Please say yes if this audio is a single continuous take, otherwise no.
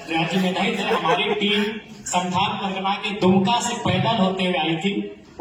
yes